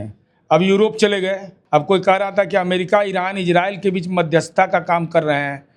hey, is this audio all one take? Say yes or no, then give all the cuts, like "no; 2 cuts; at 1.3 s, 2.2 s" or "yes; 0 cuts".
no; 1 cut; at 1.5 s